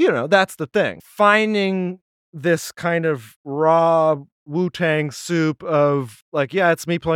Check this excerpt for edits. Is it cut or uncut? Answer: cut